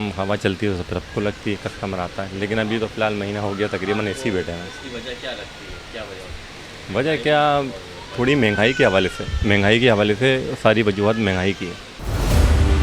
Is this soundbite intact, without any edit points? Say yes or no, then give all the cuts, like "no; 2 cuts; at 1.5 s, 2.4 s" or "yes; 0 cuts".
yes; 0 cuts